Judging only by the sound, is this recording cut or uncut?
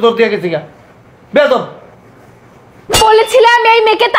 cut